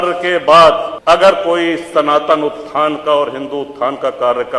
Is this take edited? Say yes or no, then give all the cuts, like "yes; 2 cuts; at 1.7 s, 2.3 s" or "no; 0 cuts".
yes; 1 cut; at 0.9 s